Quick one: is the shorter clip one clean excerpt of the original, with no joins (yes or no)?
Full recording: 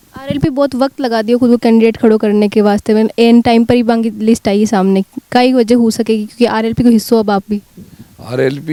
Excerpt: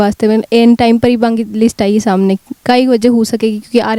yes